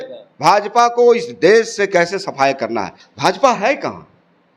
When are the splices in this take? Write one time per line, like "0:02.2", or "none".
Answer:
0:03.0